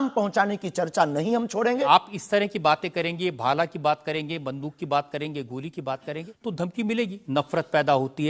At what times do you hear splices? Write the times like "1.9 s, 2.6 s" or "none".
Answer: 1.9 s, 6.3 s, 7.2 s

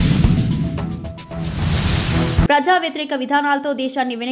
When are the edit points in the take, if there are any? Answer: 2.5 s

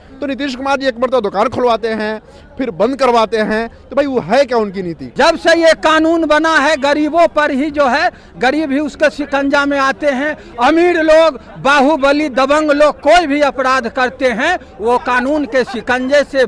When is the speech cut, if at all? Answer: 5.0 s

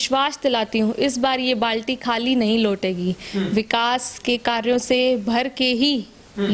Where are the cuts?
none

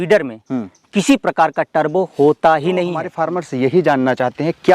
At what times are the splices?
3.0 s

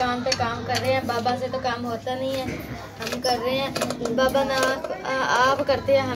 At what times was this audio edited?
none

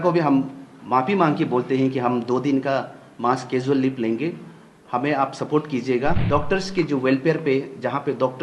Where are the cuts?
6.2 s

